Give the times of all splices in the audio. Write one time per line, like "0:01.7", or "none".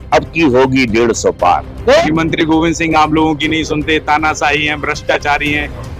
0:02.0